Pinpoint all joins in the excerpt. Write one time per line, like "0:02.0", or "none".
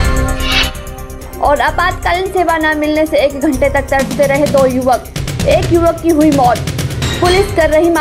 0:00.9